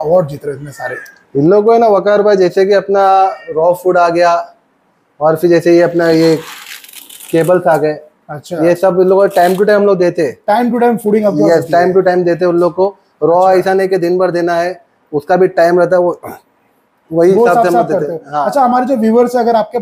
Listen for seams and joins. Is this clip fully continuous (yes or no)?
yes